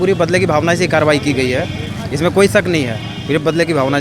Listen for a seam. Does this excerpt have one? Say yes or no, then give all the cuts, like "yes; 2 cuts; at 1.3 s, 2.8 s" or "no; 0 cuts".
no; 0 cuts